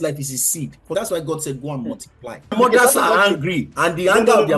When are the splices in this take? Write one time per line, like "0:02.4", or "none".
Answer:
0:00.9
0:02.5